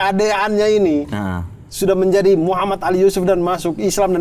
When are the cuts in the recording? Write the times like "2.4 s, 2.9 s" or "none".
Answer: none